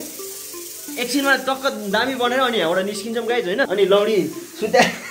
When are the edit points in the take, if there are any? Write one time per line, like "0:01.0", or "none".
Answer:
0:03.7